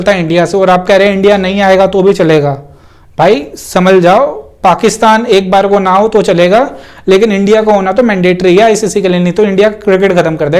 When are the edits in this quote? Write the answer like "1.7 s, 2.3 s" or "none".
none